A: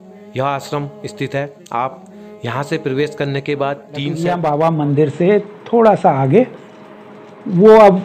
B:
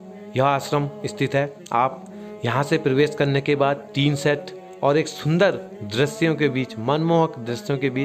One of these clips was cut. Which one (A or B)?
A